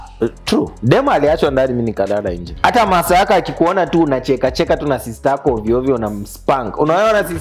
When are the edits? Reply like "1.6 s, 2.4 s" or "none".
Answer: 2.5 s